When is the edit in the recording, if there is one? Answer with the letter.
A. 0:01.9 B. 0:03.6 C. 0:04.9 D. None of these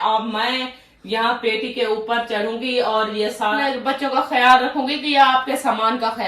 B